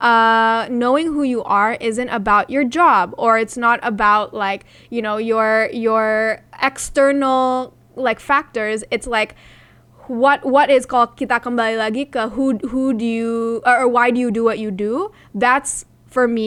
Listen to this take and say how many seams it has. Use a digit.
0